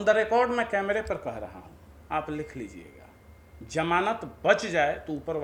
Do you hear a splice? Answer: no; 0 cuts

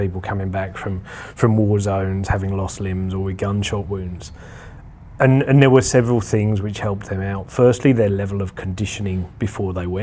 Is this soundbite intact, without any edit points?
yes; 0 cuts

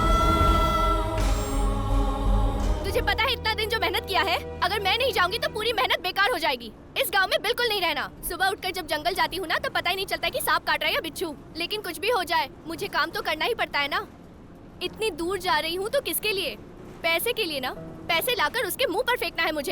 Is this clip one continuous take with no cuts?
no; 2 cuts; at 2.8 s, 8.1 s

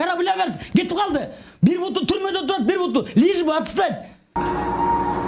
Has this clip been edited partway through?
yes; 1 cut; at 4.4 s

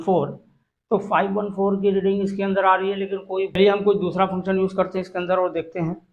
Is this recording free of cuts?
no; 1 cut; at 3.6 s

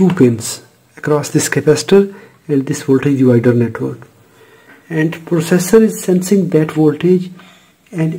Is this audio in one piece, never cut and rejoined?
yes; 0 cuts

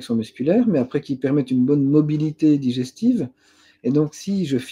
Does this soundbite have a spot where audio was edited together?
no; 0 cuts

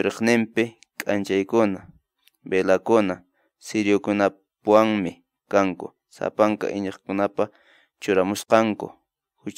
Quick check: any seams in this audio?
no; 0 cuts

